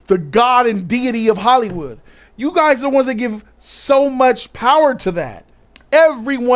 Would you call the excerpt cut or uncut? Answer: cut